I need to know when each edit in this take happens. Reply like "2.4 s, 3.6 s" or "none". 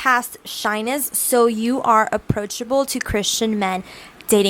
none